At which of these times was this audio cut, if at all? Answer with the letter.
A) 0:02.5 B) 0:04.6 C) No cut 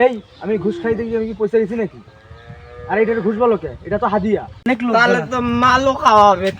B